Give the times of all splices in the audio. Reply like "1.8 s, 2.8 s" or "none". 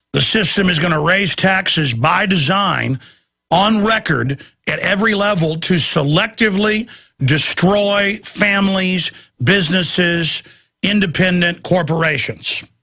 2.8 s